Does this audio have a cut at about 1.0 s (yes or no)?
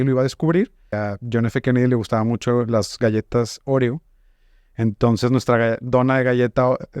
yes